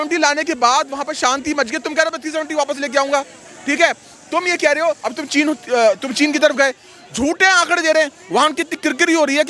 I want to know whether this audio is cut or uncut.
uncut